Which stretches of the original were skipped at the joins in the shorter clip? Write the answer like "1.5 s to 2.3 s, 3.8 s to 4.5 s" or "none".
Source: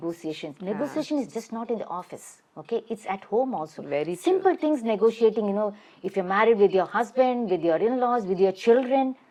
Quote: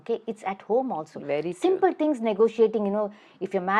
none